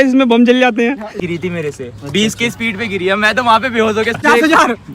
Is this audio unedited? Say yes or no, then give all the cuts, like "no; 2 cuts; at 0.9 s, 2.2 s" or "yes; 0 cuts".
no; 2 cuts; at 1.1 s, 4.2 s